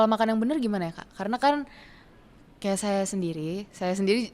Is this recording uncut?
yes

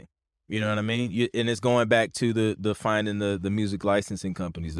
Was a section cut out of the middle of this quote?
no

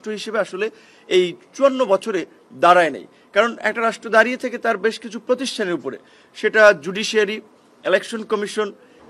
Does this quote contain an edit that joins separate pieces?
no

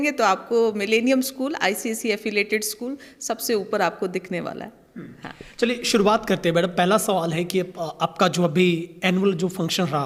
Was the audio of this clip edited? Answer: no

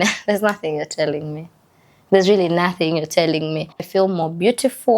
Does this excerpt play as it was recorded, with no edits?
no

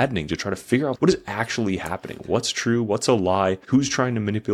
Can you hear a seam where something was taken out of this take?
yes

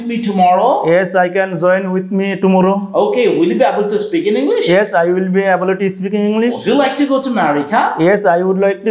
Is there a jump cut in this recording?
no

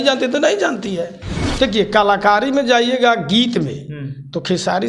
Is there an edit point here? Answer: yes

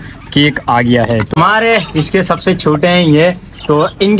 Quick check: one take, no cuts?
no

